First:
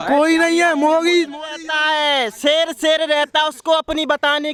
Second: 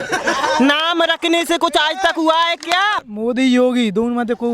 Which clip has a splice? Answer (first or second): second